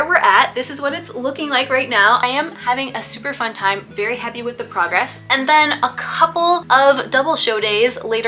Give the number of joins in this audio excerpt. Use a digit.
3